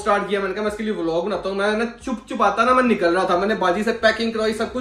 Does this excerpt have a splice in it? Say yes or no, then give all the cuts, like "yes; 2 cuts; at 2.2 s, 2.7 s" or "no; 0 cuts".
no; 0 cuts